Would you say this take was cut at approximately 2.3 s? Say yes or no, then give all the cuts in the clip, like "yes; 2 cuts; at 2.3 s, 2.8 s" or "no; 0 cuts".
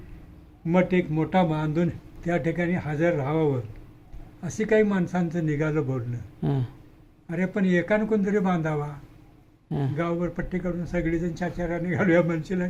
no; 0 cuts